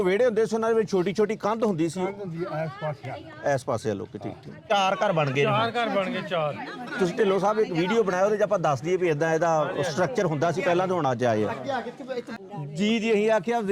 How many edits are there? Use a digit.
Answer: 2